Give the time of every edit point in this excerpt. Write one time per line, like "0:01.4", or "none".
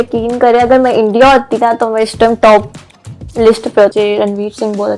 0:03.9